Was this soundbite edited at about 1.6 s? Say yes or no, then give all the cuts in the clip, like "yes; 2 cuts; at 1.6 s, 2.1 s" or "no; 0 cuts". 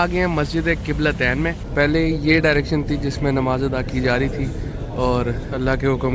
yes; 1 cut; at 1.6 s